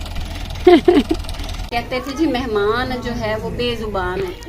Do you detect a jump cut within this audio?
yes; 1 cut; at 1.7 s

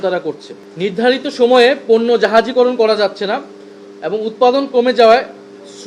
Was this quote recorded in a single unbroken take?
no; 1 cut; at 0.9 s

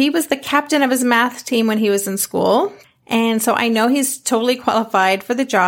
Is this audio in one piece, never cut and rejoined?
no; 1 cut; at 2.8 s

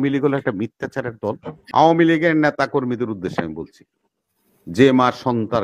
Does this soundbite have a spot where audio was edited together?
yes; 1 cut; at 1.5 s

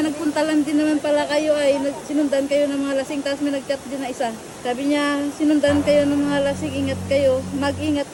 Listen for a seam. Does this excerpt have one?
no; 0 cuts

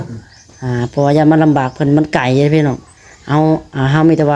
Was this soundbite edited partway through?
no; 0 cuts

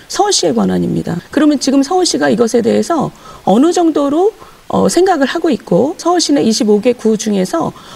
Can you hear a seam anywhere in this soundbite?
yes; 2 cuts; at 1.2 s, 6.0 s

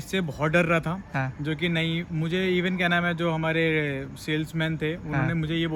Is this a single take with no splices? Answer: yes; 0 cuts

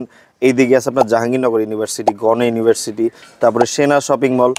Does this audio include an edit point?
no; 0 cuts

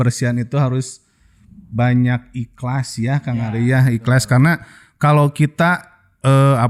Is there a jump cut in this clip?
no; 0 cuts

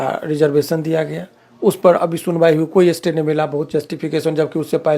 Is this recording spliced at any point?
no; 0 cuts

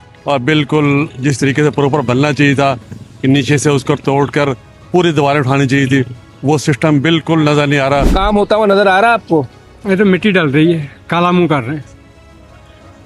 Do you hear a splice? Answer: yes; 1 cut; at 8.1 s

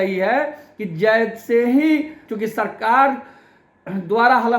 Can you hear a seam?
yes; 1 cut; at 2.2 s

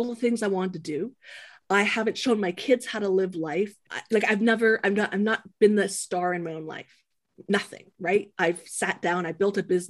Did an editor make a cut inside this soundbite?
yes; 1 cut; at 3.9 s

